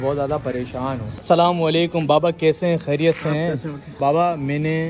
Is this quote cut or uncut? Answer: cut